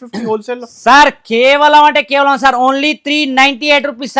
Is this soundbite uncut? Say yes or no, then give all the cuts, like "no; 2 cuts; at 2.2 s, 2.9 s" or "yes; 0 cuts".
yes; 0 cuts